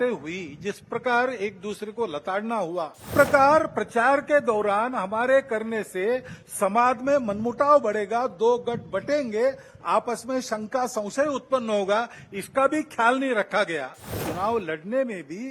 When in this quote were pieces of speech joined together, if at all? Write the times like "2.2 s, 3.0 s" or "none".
3.1 s, 14.2 s